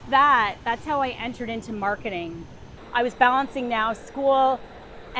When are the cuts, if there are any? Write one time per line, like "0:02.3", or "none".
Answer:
0:02.8